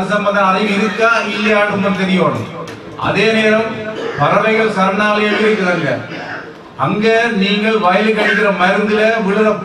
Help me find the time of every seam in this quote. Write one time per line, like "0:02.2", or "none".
none